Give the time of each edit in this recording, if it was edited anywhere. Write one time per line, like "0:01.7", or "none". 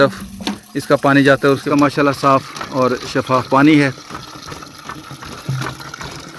0:01.7